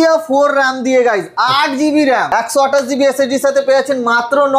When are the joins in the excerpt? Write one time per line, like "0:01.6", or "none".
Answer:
0:02.3